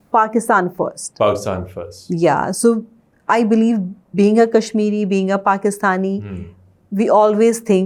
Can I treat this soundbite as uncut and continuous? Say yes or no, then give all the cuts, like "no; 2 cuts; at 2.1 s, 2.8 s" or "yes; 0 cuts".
yes; 0 cuts